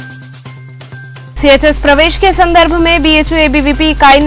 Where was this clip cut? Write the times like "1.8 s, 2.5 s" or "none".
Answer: none

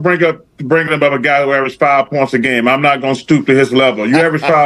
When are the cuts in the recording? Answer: none

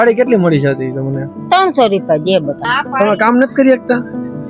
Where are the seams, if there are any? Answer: 2.7 s

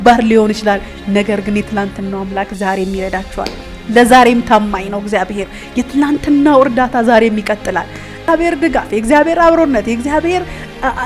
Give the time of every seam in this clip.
8.3 s

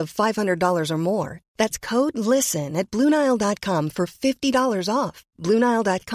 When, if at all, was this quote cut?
none

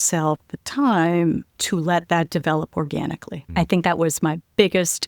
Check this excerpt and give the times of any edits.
3.3 s

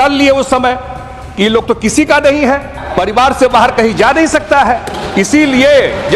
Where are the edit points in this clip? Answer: 2.8 s

